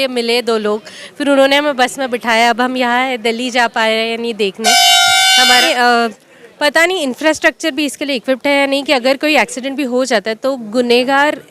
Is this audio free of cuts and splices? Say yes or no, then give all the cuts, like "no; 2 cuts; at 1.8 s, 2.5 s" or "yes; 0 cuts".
no; 1 cut; at 5.7 s